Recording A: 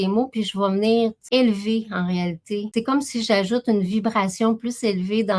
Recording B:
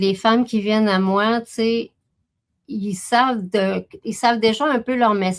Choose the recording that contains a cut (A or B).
A